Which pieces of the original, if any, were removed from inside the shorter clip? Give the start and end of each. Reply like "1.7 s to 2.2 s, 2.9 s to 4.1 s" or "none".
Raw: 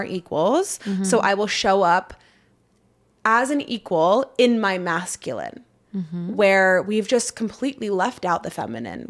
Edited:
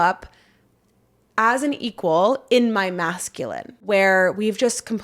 5.6 s to 6.2 s